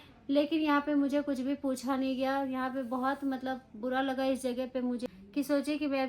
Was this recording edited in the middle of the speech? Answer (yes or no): yes